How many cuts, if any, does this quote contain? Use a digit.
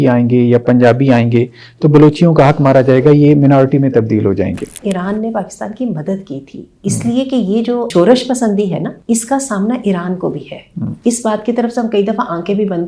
3